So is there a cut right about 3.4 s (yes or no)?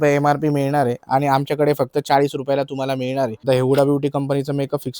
yes